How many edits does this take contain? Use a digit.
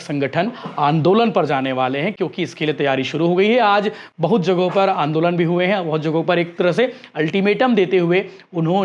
0